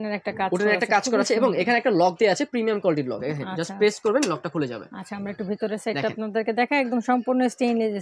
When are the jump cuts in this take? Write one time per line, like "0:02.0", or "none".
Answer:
none